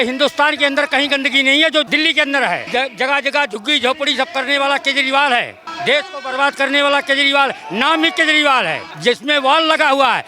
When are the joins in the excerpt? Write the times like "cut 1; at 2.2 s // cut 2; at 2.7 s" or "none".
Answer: cut 1; at 1.9 s // cut 2; at 2.6 s // cut 3; at 5.6 s // cut 4; at 8.9 s

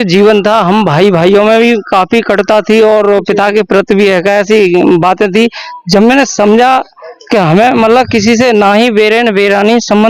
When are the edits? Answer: none

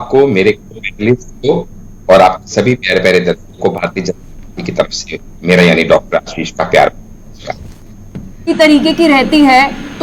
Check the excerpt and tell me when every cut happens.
cut 1; at 8.5 s

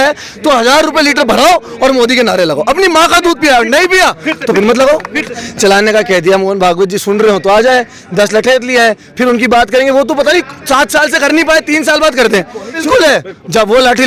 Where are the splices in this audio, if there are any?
cut 1; at 5.4 s // cut 2; at 12.8 s

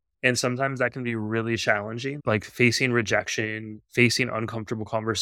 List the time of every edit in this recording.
cut 1; at 2.2 s

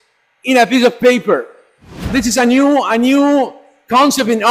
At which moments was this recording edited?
cut 1; at 2.1 s

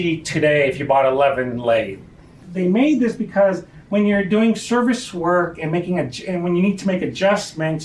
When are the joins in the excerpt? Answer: cut 1; at 2.5 s

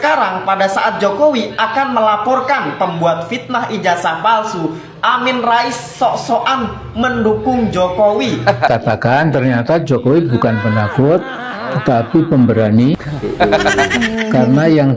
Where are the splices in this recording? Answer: cut 1; at 8.7 s

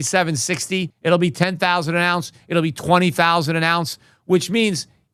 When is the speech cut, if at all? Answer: none

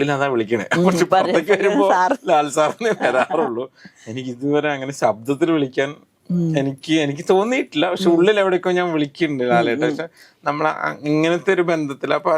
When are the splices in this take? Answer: none

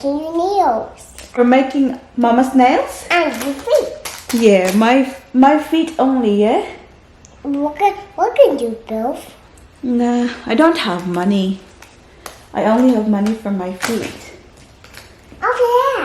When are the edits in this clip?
cut 1; at 1.4 s

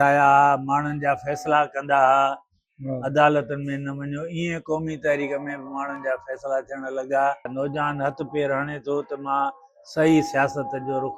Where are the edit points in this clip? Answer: cut 1; at 7.5 s

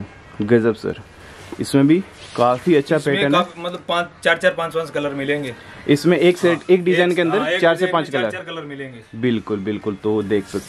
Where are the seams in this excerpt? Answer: none

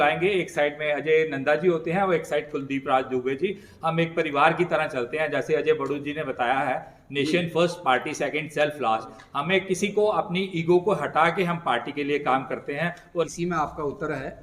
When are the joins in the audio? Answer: cut 1; at 13.3 s

